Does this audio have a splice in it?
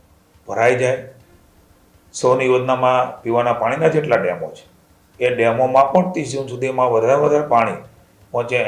no; 0 cuts

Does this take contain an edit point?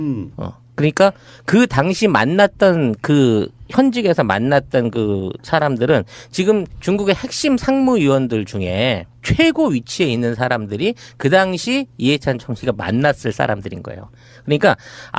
no; 0 cuts

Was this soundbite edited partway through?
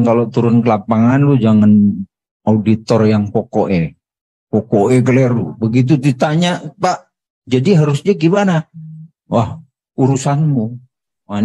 no; 0 cuts

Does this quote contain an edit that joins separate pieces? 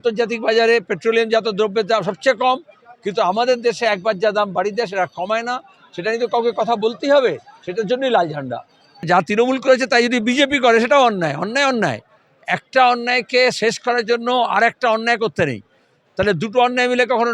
yes; 1 cut; at 9.0 s

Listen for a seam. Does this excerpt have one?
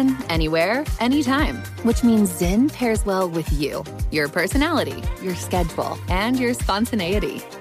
no; 0 cuts

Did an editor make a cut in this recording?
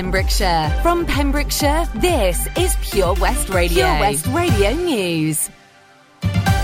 yes; 1 cut; at 3.7 s

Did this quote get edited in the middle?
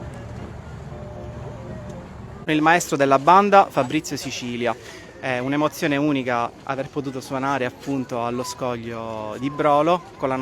yes; 1 cut; at 2.5 s

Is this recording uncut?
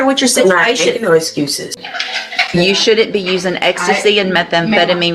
no; 1 cut; at 1.8 s

